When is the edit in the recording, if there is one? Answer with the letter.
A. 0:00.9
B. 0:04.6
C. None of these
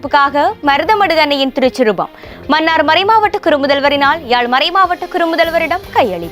C